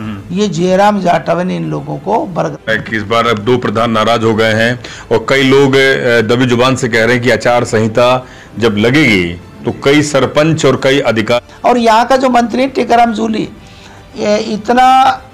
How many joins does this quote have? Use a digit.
2